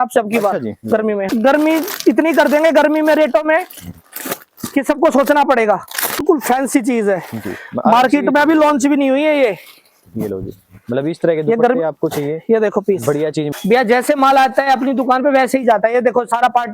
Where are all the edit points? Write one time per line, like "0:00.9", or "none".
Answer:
0:01.3
0:06.2
0:13.5